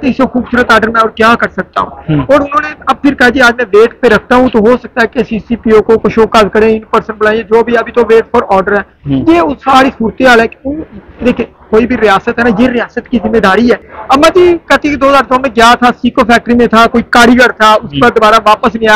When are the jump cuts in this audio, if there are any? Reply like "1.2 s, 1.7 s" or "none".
13.9 s